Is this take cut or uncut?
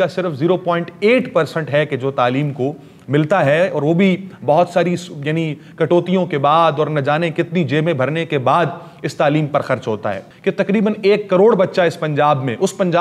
uncut